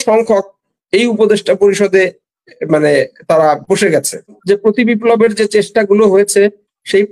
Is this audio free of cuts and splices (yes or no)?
no